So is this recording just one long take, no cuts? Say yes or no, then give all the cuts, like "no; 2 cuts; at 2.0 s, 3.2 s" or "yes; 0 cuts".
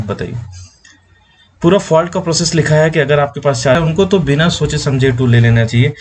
no; 1 cut; at 3.8 s